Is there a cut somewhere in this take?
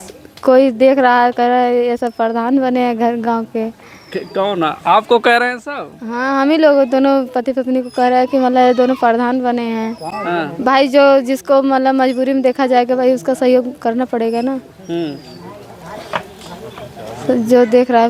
no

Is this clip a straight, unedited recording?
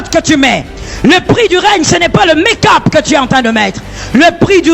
yes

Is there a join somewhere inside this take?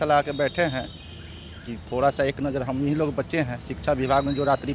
no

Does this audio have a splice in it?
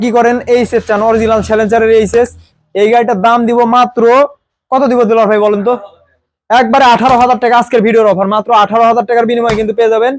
no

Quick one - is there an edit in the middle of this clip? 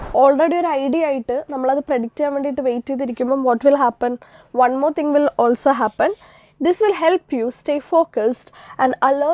no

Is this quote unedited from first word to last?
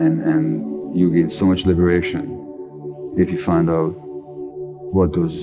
yes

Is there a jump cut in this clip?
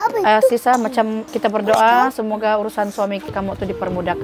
yes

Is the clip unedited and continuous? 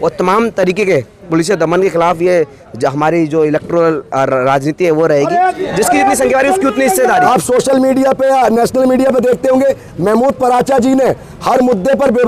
no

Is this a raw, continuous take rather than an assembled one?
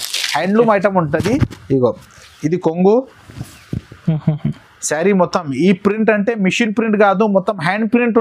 yes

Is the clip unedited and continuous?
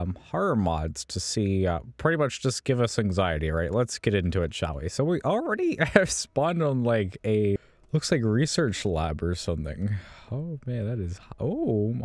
no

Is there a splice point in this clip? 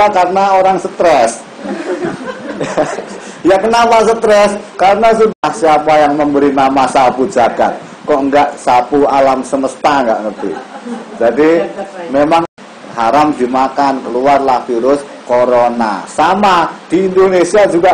yes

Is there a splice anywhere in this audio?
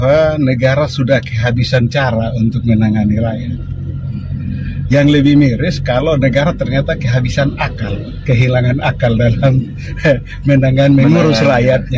no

